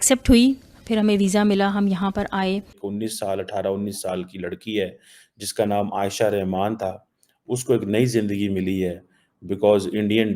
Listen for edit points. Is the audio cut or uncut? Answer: cut